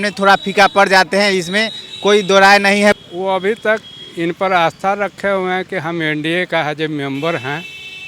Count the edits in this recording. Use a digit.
1